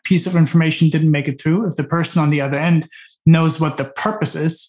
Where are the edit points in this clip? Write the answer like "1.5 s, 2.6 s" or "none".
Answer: none